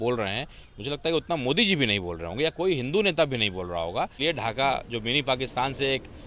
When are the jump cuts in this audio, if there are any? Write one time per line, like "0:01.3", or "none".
0:04.2